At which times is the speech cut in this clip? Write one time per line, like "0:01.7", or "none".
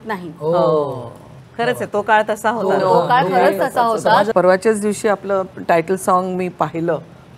0:04.3